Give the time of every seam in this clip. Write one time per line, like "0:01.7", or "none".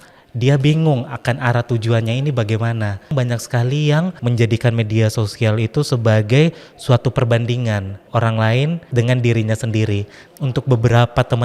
0:03.1
0:04.2
0:08.0
0:08.8
0:10.2